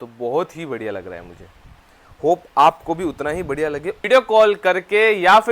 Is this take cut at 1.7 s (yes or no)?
no